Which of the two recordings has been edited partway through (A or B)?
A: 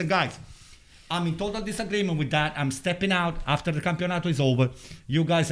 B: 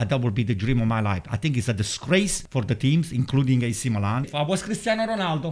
B